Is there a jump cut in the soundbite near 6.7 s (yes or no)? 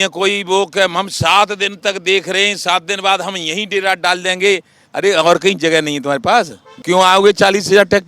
yes